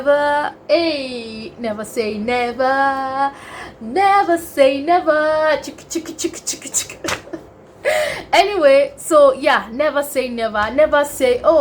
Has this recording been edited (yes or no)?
no